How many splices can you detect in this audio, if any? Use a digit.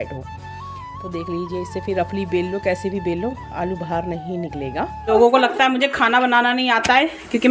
1